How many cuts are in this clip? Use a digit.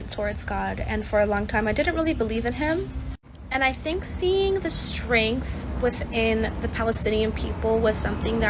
1